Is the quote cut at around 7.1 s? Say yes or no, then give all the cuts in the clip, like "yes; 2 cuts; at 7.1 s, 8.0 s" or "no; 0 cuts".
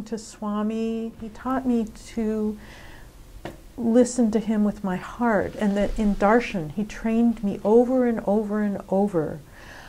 no; 1 cut; at 1.3 s